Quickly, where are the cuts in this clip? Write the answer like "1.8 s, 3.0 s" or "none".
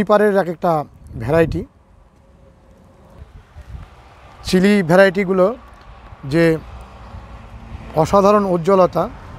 3.2 s